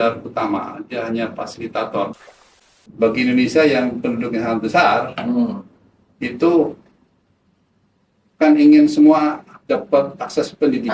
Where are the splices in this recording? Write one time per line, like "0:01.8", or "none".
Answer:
0:02.8